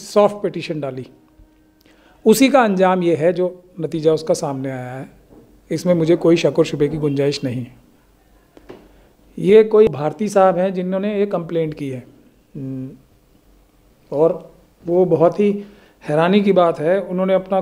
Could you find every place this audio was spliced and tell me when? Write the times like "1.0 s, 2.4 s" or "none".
none